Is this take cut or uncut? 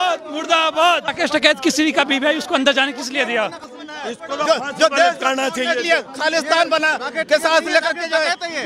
cut